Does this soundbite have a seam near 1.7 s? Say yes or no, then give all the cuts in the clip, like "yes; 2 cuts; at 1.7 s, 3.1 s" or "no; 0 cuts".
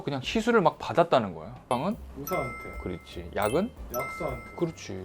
yes; 1 cut; at 1.7 s